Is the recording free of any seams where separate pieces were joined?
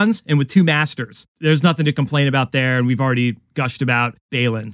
yes; 0 cuts

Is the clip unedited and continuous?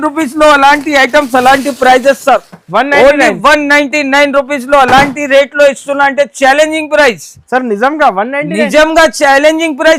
yes; 0 cuts

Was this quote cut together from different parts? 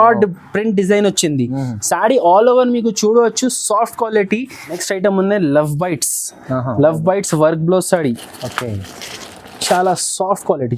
no; 0 cuts

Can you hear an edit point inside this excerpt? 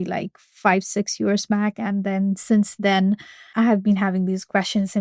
yes; 1 cut; at 3.5 s

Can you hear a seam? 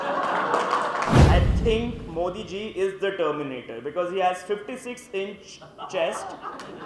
yes; 1 cut; at 1.2 s

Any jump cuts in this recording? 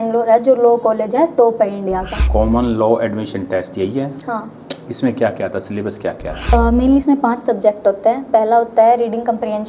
yes; 2 cuts; at 2.2 s, 6.5 s

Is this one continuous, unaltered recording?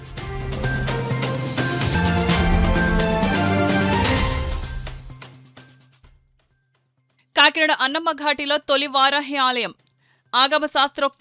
yes; 0 cuts

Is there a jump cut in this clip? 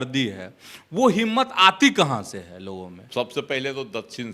yes; 1 cut; at 3.0 s

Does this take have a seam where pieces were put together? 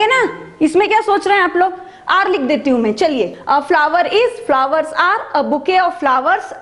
yes; 1 cut; at 3.4 s

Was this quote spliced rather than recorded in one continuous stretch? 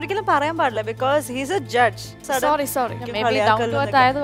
yes; 2 cuts; at 2.2 s, 3.0 s

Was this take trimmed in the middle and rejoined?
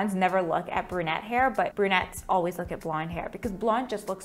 no; 0 cuts

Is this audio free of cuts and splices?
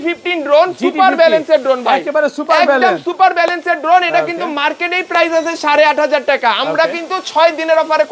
yes; 0 cuts

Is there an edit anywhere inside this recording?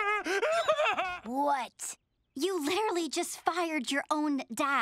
yes; 1 cut; at 1.2 s

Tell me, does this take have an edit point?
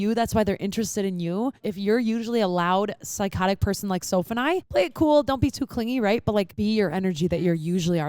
yes; 3 cuts; at 1.7 s, 4.7 s, 6.5 s

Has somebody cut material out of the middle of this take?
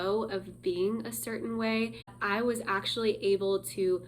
yes; 1 cut; at 2.2 s

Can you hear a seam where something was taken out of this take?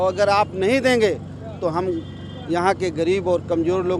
no; 0 cuts

